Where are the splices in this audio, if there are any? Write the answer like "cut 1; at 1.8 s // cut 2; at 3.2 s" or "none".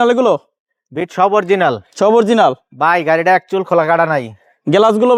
none